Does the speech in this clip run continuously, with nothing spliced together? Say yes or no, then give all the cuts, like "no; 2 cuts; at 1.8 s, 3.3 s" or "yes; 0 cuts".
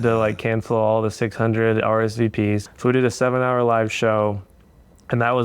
no; 1 cut; at 2.7 s